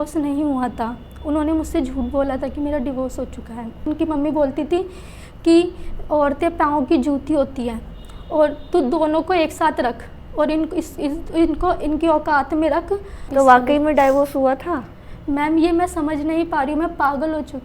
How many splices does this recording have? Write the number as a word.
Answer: two